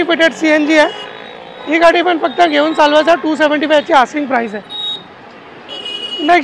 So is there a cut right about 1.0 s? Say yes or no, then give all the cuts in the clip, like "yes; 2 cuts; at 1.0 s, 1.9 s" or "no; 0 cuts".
no; 0 cuts